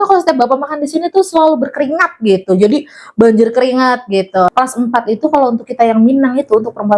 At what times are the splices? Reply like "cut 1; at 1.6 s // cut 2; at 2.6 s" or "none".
cut 1; at 4.5 s